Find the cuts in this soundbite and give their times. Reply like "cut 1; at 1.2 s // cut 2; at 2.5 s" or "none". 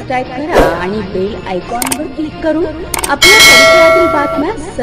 none